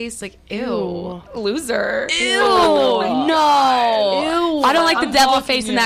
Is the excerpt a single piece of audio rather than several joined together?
yes; 0 cuts

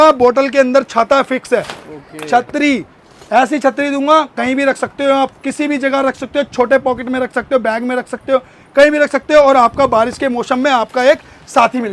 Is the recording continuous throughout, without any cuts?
yes; 0 cuts

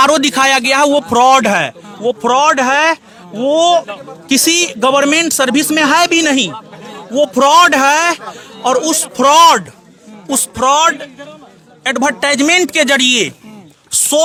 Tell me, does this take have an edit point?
no; 0 cuts

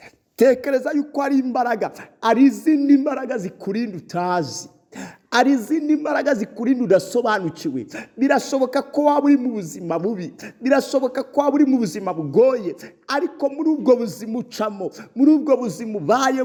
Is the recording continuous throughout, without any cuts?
yes; 0 cuts

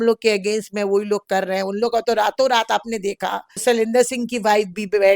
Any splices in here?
yes; 1 cut; at 3.5 s

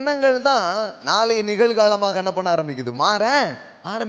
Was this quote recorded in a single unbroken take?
yes; 0 cuts

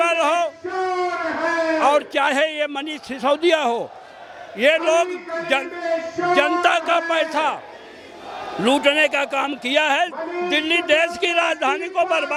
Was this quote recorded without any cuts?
yes; 0 cuts

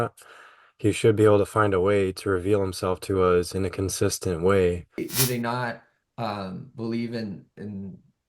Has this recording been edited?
yes; 1 cut; at 5.1 s

